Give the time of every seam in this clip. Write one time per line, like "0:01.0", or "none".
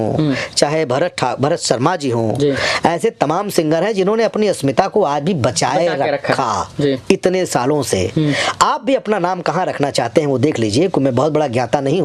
none